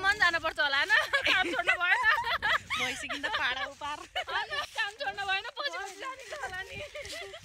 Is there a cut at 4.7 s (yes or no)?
yes